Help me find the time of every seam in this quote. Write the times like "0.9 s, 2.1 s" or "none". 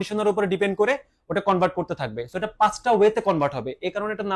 none